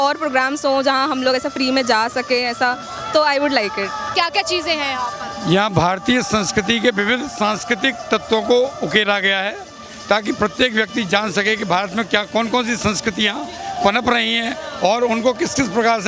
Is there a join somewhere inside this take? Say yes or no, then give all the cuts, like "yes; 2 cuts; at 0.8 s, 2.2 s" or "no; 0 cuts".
no; 0 cuts